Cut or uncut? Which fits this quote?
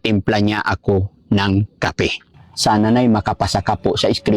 cut